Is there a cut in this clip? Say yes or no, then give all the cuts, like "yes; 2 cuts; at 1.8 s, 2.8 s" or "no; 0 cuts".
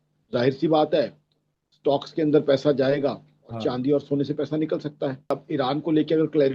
yes; 1 cut; at 5.4 s